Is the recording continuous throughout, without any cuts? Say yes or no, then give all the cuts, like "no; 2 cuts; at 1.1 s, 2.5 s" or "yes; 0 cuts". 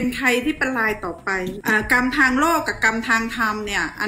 no; 1 cut; at 1.5 s